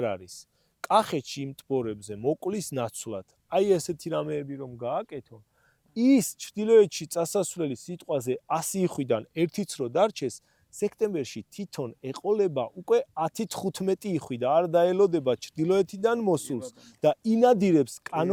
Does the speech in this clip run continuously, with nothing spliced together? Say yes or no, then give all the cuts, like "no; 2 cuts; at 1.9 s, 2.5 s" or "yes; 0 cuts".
yes; 0 cuts